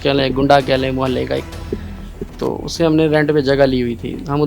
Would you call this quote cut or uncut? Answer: uncut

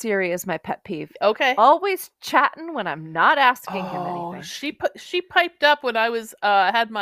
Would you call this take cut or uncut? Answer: cut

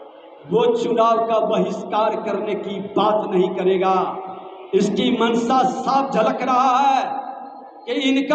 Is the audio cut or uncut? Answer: uncut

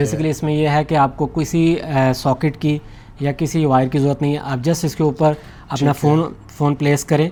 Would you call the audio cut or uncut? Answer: uncut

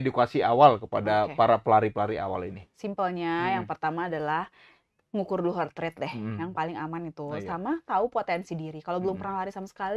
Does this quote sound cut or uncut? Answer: uncut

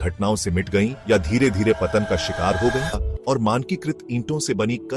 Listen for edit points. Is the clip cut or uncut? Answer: cut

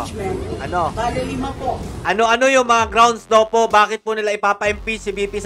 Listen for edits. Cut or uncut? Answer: cut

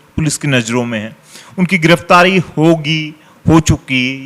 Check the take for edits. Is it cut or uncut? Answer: uncut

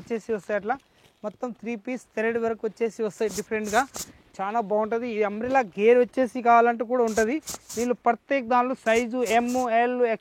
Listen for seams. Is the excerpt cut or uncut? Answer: uncut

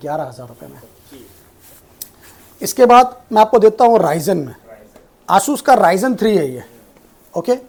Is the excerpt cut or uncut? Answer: uncut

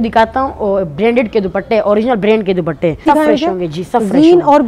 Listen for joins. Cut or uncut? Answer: cut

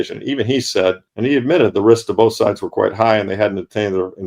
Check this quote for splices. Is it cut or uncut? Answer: cut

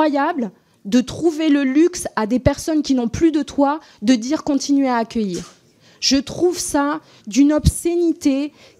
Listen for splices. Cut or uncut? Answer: uncut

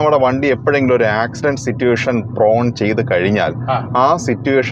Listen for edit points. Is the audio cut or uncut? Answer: uncut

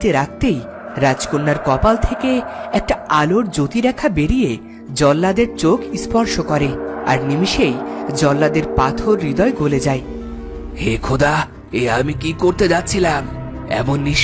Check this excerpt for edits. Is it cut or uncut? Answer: uncut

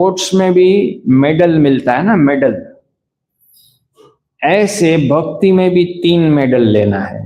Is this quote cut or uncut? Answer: uncut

